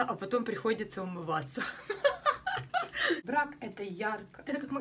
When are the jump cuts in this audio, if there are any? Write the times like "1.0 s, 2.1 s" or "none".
3.2 s